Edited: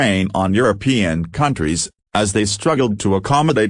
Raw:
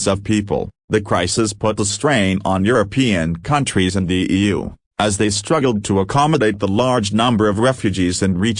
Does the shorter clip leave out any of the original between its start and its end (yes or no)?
yes